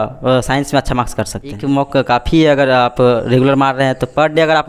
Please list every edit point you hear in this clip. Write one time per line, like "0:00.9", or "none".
0:01.6